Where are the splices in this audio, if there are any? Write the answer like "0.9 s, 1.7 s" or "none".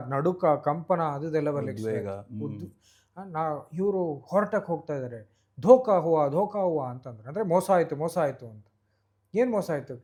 none